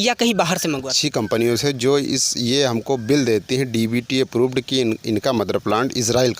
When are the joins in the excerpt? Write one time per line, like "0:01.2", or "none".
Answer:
0:01.0